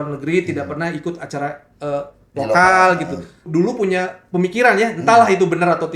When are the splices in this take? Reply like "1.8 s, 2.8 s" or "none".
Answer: 3.5 s